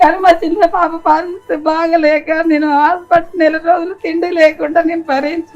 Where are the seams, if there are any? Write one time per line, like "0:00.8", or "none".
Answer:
none